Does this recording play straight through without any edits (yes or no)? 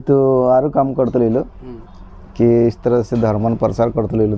yes